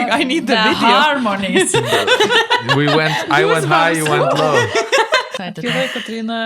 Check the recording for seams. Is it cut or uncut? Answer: cut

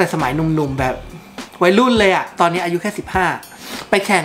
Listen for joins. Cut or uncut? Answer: cut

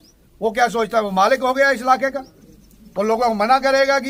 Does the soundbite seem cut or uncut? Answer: uncut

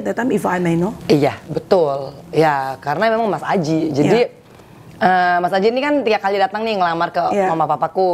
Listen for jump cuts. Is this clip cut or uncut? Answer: uncut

